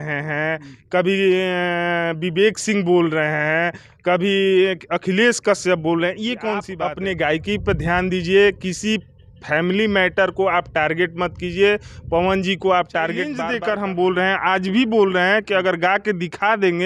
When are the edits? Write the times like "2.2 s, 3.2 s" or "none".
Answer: 6.7 s, 13.4 s